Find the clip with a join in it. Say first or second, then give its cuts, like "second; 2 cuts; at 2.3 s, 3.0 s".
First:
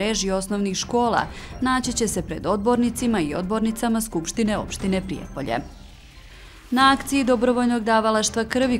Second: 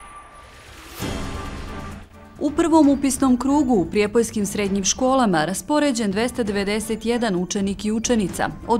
second; 1 cut; at 2.3 s